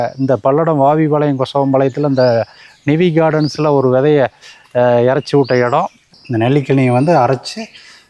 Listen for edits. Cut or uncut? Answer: cut